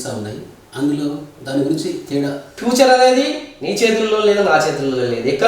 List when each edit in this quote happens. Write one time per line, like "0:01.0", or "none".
0:02.6

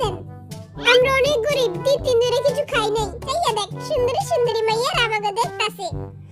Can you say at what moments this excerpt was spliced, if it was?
0:03.2

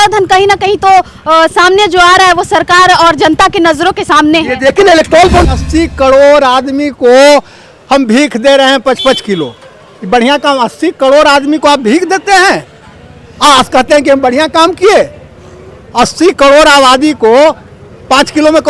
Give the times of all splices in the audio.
0:05.5

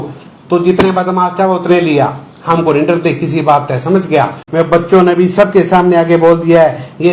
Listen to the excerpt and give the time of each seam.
0:04.4

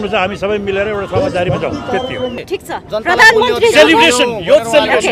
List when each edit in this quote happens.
0:02.4

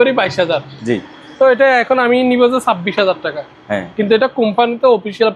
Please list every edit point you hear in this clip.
none

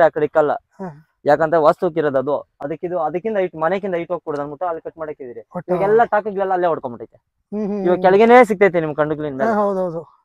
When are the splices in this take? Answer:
none

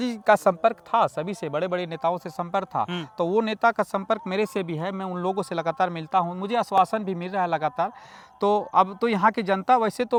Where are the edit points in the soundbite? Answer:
none

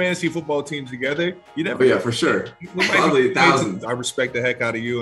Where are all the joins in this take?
0:03.8

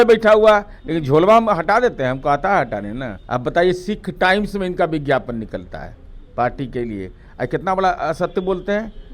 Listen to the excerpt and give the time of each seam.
0:03.1

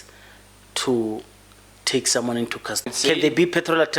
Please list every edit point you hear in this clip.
0:03.0

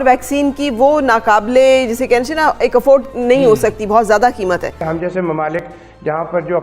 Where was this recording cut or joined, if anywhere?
0:04.8

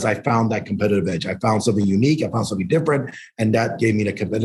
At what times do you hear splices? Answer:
none

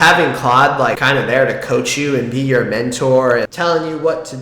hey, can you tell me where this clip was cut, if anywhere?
0:03.5

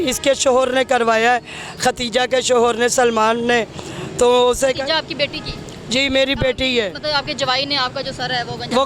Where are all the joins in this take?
none

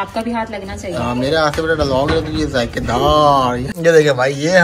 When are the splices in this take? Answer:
0:03.7

